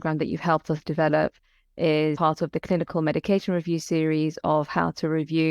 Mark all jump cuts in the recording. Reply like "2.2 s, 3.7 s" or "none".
2.2 s